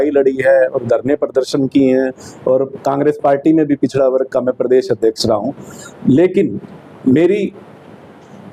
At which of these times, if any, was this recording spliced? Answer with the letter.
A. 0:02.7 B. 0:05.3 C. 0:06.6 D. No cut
D